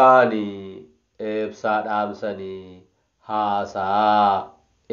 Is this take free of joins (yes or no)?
yes